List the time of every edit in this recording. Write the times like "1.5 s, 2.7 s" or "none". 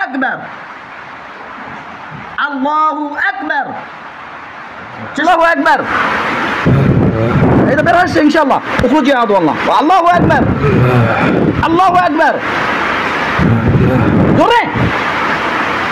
5.2 s